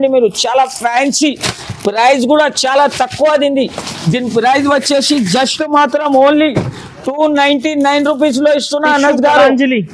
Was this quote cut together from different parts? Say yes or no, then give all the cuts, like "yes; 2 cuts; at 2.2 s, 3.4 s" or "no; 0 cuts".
no; 0 cuts